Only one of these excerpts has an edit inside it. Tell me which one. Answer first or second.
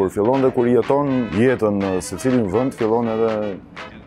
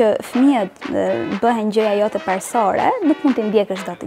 first